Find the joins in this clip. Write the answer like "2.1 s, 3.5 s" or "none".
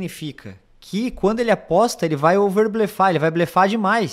none

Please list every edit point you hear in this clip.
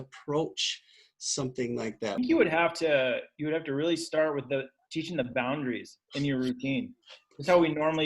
2.2 s

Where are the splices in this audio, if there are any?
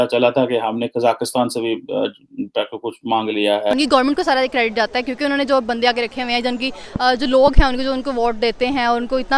3.7 s

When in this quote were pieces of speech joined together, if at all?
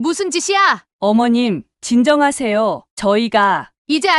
none

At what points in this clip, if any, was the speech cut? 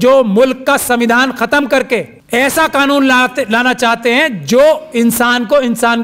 2.2 s

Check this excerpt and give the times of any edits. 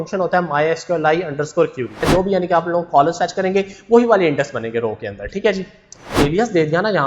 2.0 s, 6.1 s

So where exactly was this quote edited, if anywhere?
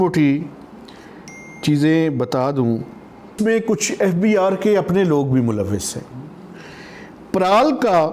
3.3 s

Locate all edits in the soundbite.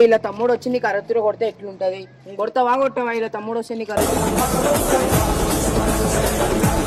none

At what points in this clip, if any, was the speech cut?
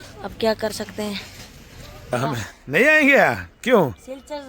2.1 s

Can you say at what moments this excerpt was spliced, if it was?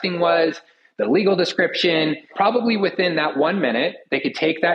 2.3 s

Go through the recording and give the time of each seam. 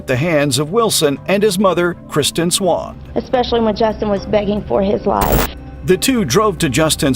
3.0 s

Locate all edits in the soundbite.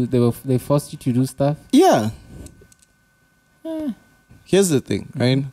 4.3 s

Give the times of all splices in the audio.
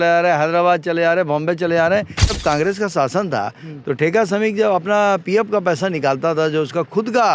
2.3 s

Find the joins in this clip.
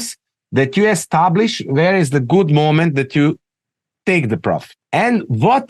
4.7 s

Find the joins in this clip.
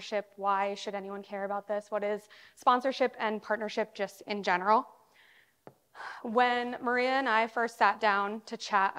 none

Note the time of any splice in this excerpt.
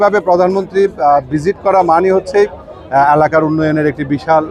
none

